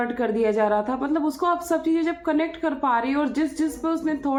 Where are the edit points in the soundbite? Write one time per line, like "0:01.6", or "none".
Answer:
none

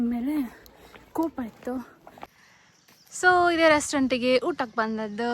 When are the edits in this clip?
0:02.4

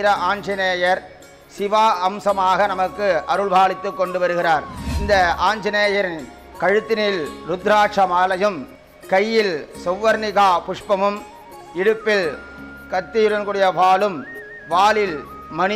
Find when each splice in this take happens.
none

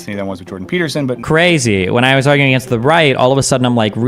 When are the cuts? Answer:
0:01.2

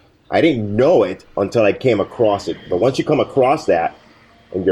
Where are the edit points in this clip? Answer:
none

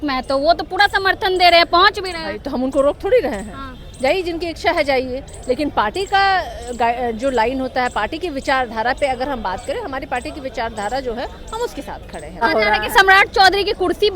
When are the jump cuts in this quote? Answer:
0:12.4

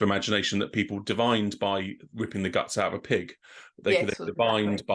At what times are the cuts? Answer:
0:02.1

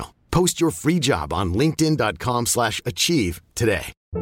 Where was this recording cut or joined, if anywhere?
none

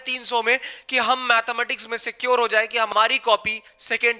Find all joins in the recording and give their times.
0:02.9

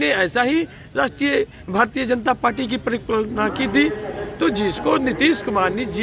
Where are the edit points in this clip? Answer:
none

